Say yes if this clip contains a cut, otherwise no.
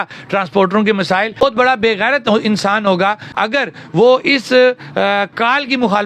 yes